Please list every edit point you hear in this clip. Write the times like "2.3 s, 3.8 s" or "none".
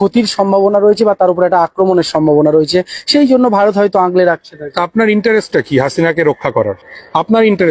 none